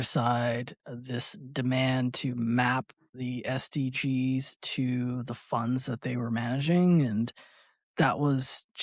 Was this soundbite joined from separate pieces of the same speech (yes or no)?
no